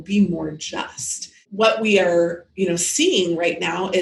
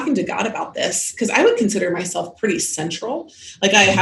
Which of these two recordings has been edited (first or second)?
first